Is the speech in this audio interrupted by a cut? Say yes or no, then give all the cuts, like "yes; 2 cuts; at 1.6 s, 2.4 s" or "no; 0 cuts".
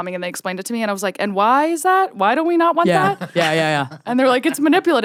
no; 0 cuts